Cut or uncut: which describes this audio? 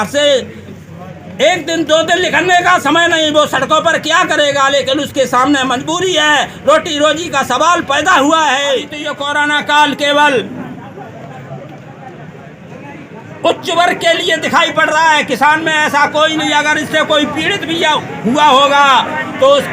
cut